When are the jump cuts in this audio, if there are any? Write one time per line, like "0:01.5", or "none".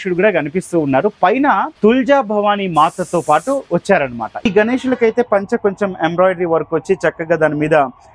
0:01.7
0:04.5